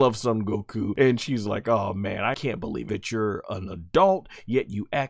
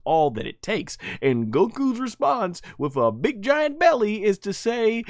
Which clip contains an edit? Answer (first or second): first